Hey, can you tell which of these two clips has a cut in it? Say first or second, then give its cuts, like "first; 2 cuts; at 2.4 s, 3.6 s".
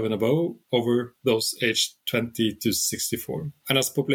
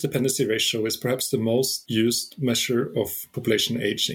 second; 1 cut; at 1.8 s